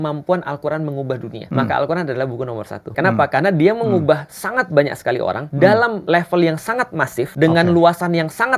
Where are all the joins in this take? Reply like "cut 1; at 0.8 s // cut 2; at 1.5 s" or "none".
cut 1; at 1.4 s // cut 2; at 2.9 s // cut 3; at 5.4 s // cut 4; at 6.0 s // cut 5; at 7.3 s

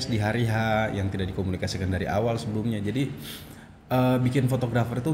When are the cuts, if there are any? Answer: none

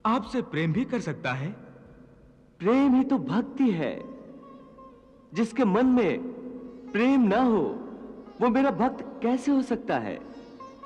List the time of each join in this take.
none

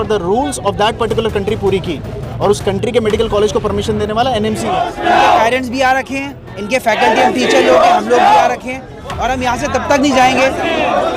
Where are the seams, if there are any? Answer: cut 1; at 4.9 s

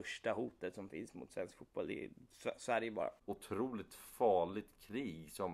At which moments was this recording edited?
cut 1; at 3.2 s

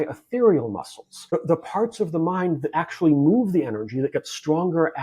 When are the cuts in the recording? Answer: cut 1; at 1.3 s

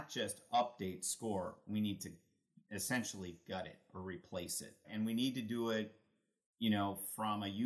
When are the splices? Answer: cut 1; at 4.9 s

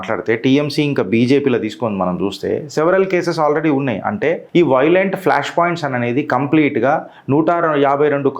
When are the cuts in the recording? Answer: cut 1; at 4.4 s

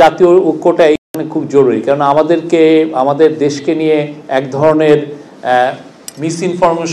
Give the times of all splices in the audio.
none

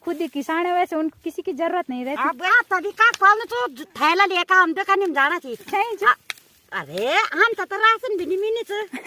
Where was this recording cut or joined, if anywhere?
cut 1; at 2.5 s // cut 2; at 5.6 s

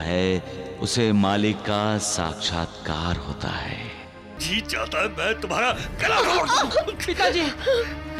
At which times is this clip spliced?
cut 1; at 4.4 s

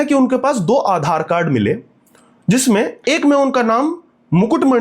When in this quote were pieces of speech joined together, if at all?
none

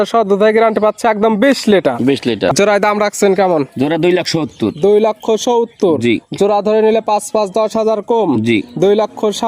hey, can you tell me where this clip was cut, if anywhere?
cut 1; at 2.5 s

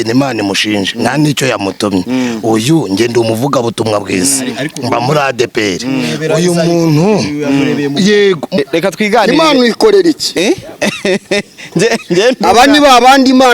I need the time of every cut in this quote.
cut 1; at 8.6 s

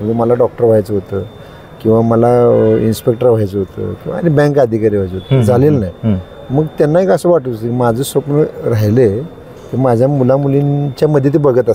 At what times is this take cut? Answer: none

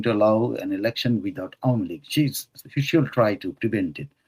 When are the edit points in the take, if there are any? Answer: none

